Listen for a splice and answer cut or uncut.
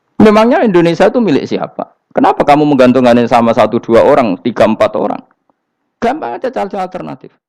uncut